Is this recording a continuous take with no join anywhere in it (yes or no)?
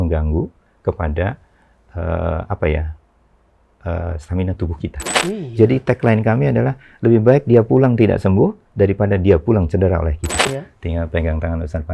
no